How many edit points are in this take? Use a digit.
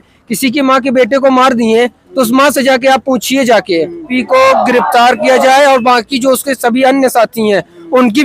1